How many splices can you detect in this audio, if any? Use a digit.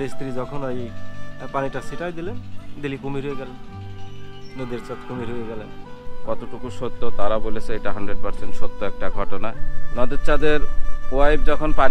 2